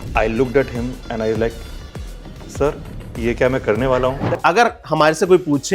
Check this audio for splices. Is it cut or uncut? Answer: cut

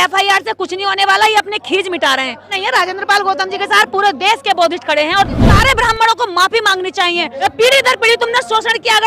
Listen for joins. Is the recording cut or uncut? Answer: cut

